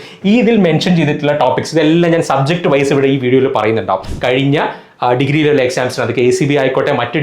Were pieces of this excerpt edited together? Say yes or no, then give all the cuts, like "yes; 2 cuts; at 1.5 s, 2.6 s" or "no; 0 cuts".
yes; 1 cut; at 4.1 s